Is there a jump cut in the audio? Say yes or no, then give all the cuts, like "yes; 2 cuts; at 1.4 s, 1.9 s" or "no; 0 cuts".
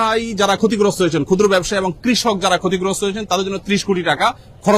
no; 0 cuts